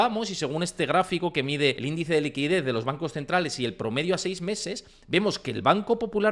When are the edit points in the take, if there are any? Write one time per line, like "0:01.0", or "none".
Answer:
0:01.8